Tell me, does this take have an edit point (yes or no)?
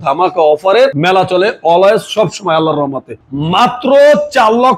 yes